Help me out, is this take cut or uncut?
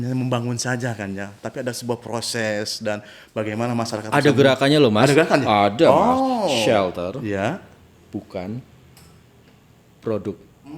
uncut